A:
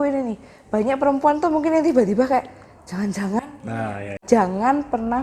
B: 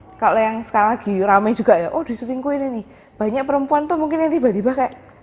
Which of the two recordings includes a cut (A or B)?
A